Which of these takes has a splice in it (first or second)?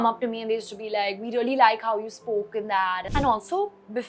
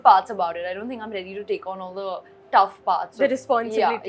first